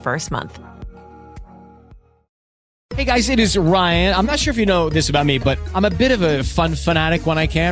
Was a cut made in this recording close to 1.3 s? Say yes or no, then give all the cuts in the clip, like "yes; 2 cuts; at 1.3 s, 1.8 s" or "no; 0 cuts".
no; 1 cut; at 2.7 s